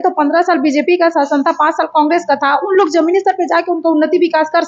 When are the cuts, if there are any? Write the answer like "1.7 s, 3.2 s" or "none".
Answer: none